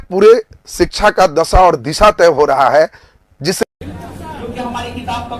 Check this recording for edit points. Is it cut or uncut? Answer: cut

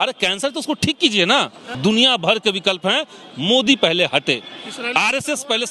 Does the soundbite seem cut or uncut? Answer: cut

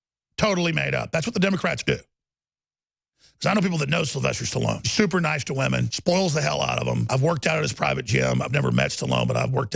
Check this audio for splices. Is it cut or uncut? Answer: cut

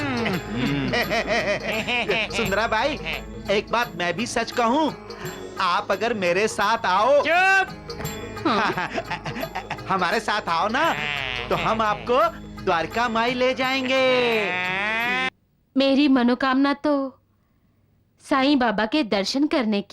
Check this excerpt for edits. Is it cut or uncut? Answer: cut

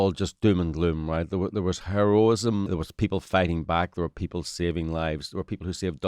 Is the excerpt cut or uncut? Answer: cut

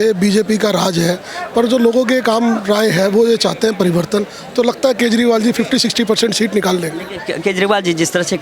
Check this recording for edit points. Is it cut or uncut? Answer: uncut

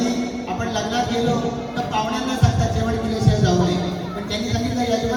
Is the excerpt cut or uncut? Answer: uncut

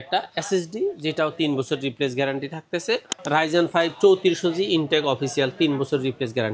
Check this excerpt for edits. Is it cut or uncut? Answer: cut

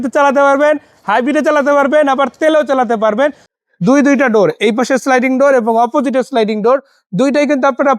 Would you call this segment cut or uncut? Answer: cut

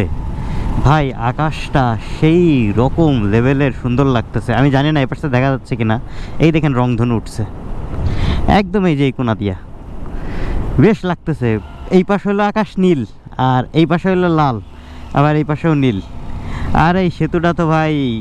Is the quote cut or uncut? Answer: uncut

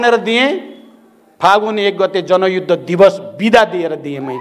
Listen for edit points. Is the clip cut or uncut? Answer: uncut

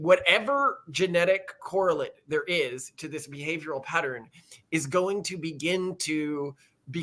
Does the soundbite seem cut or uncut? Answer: uncut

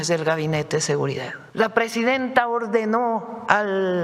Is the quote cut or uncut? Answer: cut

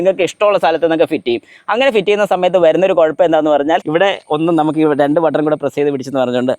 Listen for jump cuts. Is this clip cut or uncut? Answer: cut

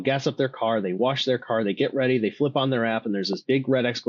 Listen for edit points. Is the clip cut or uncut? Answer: uncut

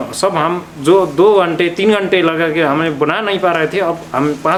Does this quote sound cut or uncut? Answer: uncut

